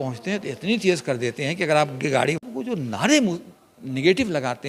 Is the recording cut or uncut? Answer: cut